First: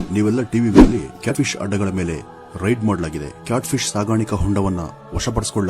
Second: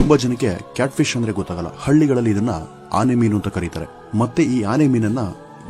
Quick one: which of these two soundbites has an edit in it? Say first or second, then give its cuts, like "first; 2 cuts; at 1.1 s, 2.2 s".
first; 1 cut; at 1.3 s